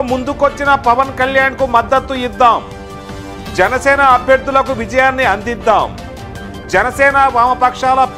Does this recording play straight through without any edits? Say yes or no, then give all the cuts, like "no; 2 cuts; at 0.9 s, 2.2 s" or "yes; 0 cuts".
yes; 0 cuts